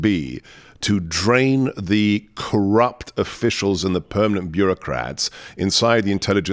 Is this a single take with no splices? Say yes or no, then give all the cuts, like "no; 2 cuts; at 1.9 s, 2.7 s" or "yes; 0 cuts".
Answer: yes; 0 cuts